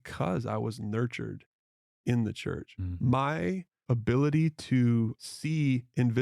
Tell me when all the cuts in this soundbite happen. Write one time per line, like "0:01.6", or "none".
0:03.7
0:05.2